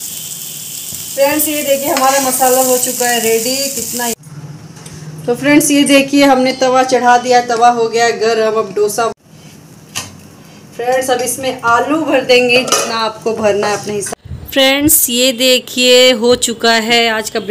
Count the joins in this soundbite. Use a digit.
3